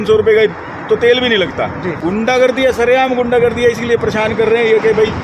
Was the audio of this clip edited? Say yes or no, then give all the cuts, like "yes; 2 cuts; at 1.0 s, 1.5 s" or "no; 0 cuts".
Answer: yes; 1 cut; at 1.9 s